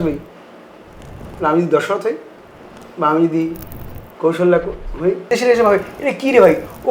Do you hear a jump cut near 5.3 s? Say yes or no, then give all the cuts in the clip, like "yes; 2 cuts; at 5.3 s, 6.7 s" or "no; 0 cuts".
yes; 1 cut; at 5.3 s